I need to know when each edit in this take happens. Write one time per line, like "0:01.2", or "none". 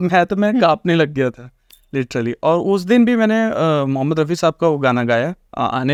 none